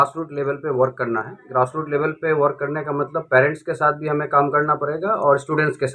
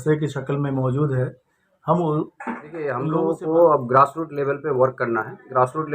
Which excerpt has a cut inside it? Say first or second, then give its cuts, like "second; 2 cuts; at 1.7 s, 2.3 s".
second; 1 cut; at 3.0 s